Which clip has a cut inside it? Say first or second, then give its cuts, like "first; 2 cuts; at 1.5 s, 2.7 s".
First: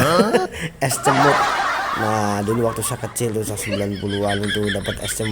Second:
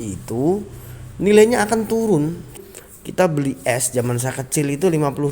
second; 1 cut; at 2.6 s